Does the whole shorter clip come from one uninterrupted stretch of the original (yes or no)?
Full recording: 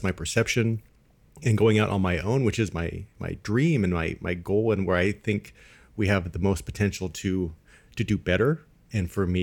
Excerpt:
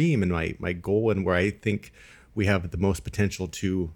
yes